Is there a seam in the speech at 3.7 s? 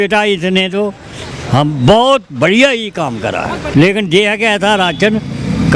yes; 1 cut; at 3.7 s

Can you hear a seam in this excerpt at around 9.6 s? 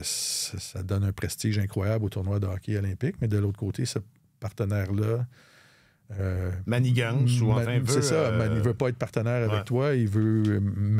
no; 0 cuts

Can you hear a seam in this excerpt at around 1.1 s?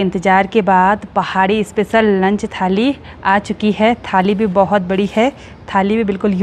no; 0 cuts

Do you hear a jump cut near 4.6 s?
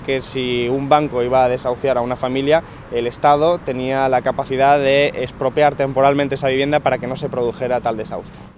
no; 1 cut; at 2.7 s

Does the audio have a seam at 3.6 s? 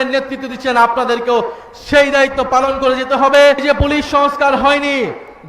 yes; 1 cut; at 3.6 s

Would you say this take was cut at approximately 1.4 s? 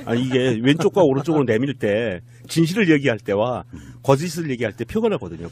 no; 1 cut; at 2.7 s

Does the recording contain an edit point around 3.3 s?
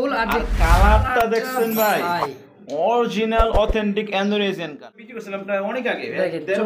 no; 1 cut; at 4.9 s

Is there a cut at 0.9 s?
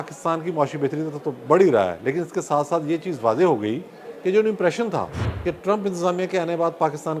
no; 1 cut; at 5.2 s

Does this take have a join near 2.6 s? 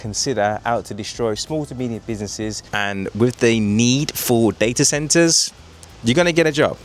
yes; 1 cut; at 2.6 s

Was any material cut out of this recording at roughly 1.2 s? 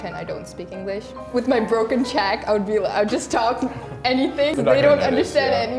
yes; 2 cuts; at 1.2 s, 4.6 s

